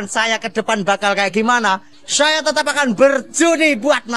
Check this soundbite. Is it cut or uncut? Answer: uncut